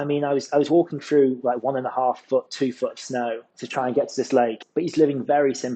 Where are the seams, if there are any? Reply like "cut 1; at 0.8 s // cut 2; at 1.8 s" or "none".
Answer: cut 1; at 3.4 s // cut 2; at 4.6 s